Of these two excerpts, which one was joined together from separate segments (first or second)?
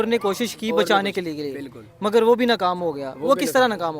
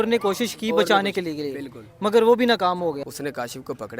second